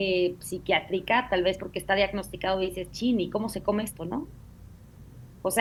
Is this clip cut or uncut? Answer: uncut